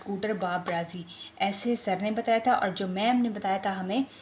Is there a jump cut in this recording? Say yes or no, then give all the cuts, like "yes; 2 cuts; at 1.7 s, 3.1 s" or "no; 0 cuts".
no; 0 cuts